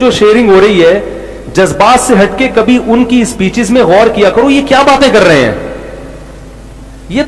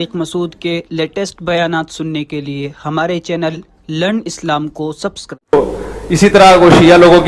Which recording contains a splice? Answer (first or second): second